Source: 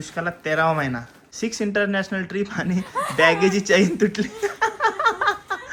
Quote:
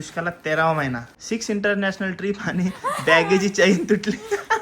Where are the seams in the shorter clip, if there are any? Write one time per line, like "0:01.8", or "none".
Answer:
0:01.1